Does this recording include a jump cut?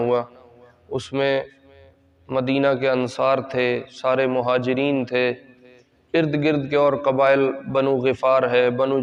no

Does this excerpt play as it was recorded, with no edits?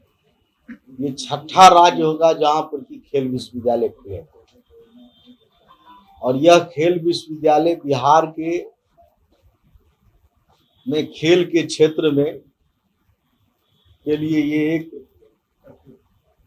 yes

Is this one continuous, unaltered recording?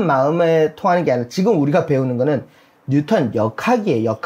yes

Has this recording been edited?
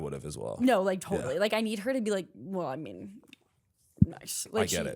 no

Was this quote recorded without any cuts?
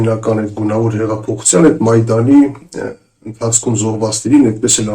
yes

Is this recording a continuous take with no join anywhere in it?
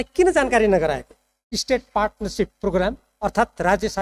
yes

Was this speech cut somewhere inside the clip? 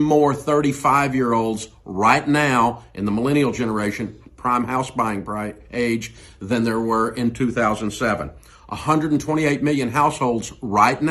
yes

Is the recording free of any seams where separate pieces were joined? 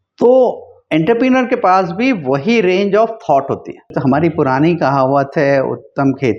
no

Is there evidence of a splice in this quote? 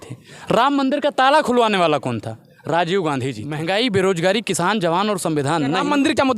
yes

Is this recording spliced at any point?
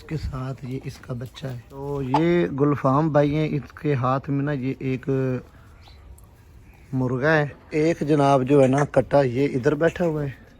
yes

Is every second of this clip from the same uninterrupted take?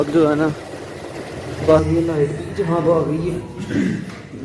no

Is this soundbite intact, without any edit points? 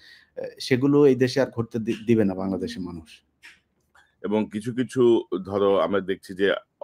yes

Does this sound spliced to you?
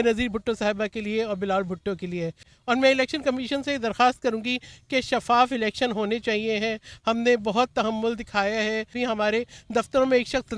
yes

